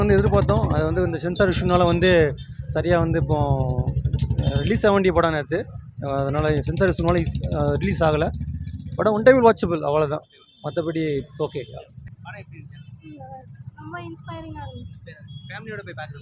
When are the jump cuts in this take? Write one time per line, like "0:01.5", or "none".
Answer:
0:12.2